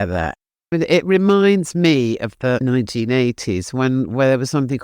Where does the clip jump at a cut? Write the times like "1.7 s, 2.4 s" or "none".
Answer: 0.7 s, 2.6 s